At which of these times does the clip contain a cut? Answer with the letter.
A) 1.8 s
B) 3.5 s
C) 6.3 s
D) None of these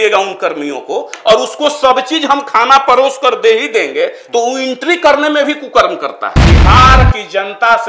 C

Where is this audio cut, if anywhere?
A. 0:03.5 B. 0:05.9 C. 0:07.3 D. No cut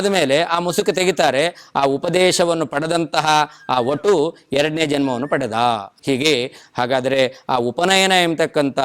B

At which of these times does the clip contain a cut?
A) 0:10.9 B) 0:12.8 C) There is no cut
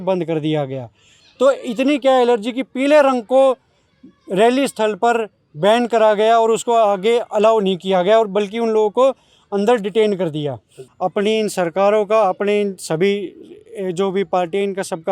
A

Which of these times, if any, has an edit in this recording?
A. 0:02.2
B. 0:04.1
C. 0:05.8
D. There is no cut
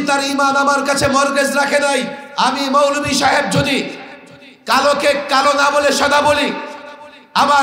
A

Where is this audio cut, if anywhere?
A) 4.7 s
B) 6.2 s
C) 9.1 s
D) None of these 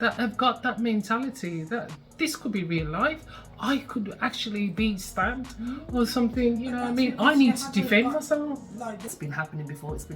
C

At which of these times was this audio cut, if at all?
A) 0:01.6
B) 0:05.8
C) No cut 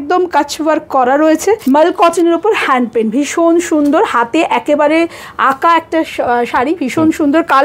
A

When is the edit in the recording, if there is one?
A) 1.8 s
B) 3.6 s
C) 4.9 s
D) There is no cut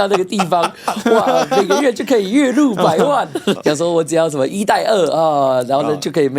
B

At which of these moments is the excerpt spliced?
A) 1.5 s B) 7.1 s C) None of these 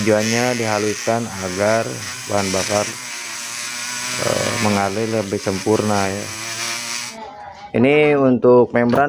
B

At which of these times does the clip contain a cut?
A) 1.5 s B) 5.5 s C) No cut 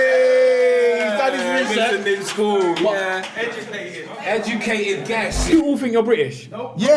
B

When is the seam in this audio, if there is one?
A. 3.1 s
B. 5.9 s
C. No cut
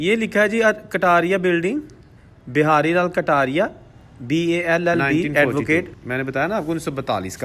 B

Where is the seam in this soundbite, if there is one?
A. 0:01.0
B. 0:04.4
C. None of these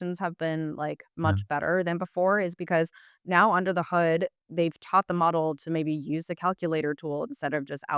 B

